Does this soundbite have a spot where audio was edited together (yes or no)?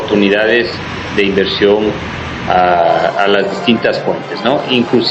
no